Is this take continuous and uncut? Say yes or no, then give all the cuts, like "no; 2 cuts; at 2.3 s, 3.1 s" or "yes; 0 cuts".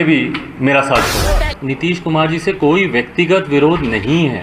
no; 1 cut; at 1.4 s